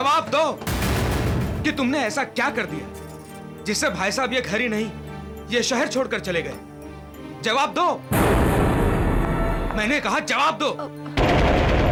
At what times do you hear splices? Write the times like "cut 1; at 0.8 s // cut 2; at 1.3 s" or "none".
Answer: none